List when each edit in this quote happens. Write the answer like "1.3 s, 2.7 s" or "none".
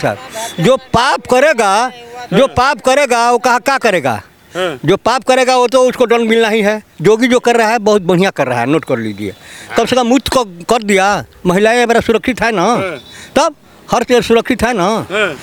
none